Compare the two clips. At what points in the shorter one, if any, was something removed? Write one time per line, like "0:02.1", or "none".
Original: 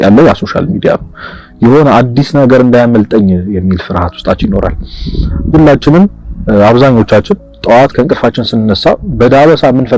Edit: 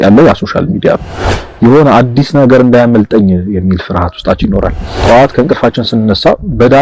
0:04.9